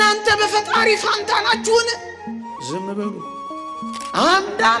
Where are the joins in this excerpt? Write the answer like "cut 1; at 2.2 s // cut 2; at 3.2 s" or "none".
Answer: cut 1; at 3.5 s